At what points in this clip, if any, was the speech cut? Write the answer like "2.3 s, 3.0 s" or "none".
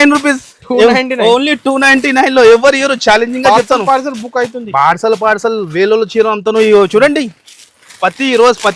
none